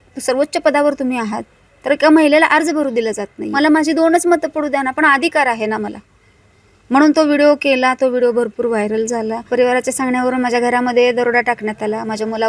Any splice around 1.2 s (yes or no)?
no